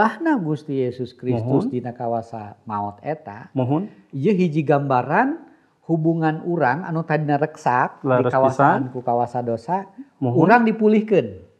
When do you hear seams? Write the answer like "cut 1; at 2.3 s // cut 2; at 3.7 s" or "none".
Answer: none